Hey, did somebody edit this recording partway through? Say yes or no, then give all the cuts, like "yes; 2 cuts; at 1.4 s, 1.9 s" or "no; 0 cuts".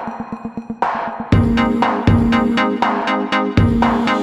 no; 0 cuts